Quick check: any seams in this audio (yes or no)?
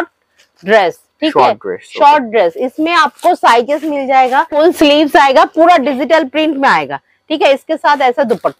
yes